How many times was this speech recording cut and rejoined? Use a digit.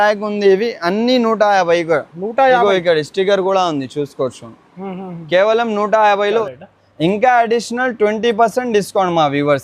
1